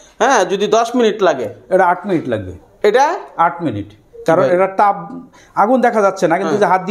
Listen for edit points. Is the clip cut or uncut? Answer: uncut